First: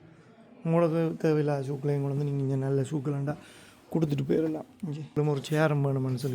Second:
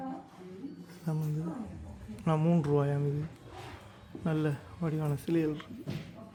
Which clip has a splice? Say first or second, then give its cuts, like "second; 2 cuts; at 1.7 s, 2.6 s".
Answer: first; 1 cut; at 5.2 s